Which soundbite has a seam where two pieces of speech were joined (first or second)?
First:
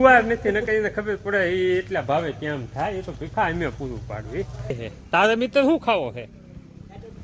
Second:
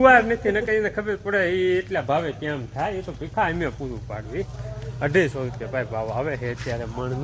first